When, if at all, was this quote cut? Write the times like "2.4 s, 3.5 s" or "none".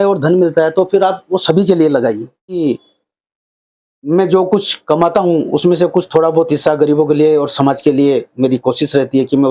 2.6 s